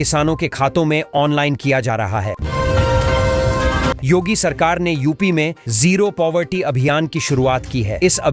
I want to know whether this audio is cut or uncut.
cut